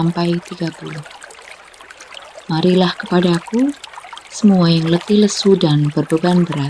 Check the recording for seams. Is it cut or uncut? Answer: cut